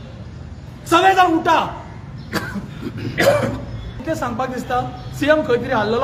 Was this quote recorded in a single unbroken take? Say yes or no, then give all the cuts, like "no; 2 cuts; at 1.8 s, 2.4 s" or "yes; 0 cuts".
no; 1 cut; at 4.0 s